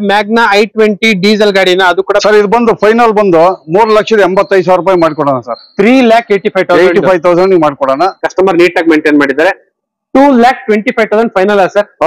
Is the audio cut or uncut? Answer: cut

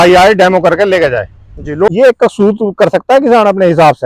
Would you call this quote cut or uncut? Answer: cut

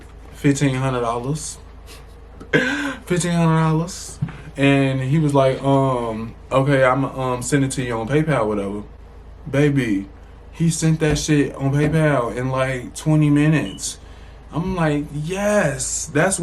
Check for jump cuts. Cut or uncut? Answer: uncut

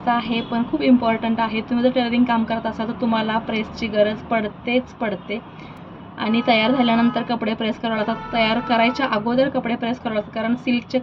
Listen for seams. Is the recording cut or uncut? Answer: uncut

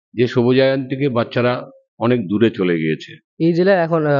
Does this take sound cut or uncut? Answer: cut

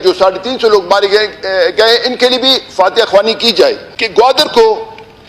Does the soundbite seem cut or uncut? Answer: cut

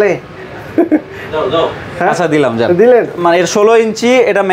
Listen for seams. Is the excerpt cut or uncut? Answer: cut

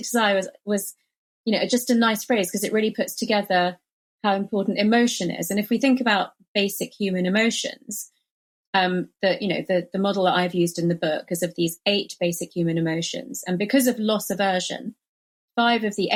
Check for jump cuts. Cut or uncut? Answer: uncut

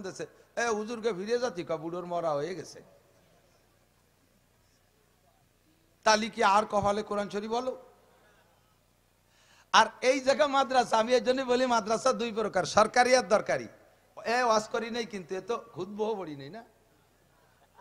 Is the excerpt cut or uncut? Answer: uncut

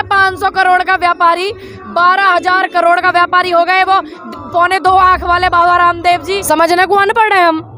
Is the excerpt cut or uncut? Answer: cut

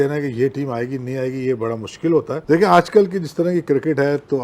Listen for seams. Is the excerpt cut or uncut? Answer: cut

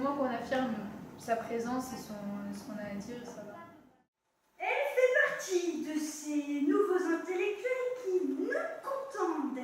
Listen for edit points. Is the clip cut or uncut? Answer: uncut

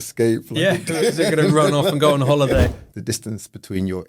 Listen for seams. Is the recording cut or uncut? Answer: cut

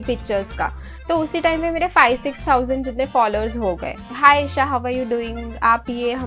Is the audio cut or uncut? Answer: cut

